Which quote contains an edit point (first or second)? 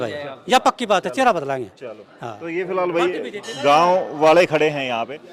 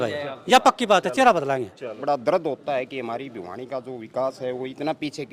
second